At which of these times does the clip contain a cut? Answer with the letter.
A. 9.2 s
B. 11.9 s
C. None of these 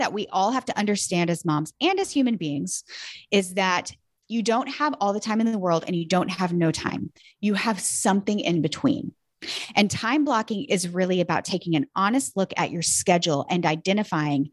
C